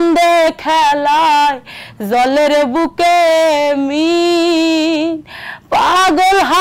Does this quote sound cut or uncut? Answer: uncut